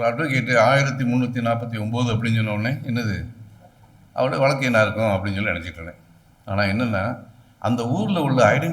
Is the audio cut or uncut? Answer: uncut